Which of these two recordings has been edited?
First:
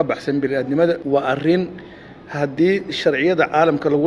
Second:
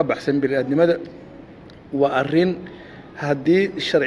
first; 1 cut; at 1.0 s

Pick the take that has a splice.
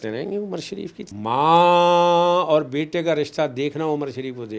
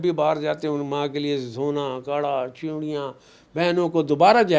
first; 1 cut; at 1.0 s

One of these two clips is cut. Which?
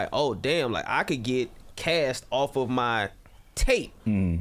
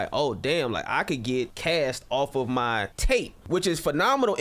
second; 2 cuts; at 1.6 s, 3.4 s

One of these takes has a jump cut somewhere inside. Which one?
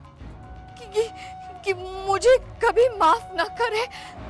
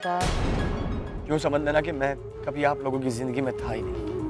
second; 1 cut; at 1.1 s

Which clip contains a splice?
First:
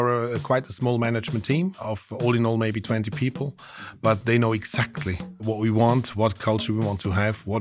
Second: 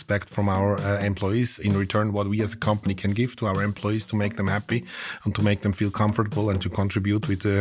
first; 2 cuts; at 1.8 s, 5.4 s

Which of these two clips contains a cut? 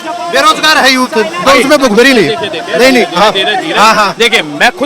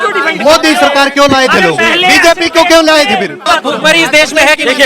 second; 1 cut; at 3.4 s

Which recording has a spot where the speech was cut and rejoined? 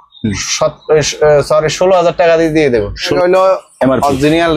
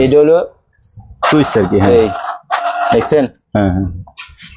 first; 1 cut; at 3.1 s

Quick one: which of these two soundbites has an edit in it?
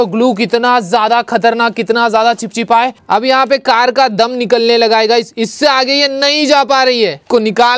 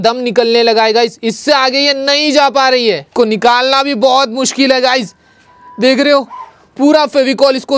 first; 1 cut; at 3.0 s

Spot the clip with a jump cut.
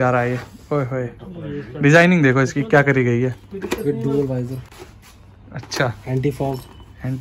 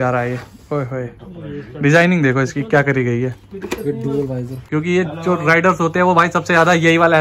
second; 1 cut; at 4.6 s

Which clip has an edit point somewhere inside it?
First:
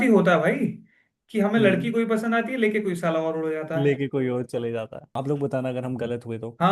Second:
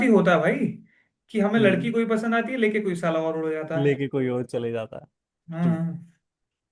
first; 1 cut; at 5.0 s

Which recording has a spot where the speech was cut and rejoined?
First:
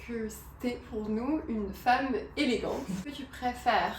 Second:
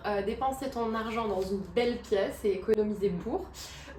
first; 1 cut; at 3.0 s

